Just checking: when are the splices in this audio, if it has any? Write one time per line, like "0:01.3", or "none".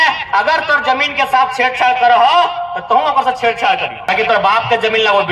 0:04.1